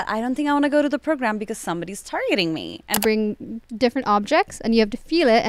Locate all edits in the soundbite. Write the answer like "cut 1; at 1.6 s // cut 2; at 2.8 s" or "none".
cut 1; at 3.0 s